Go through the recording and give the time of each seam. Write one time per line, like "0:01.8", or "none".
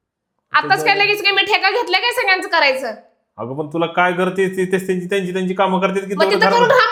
none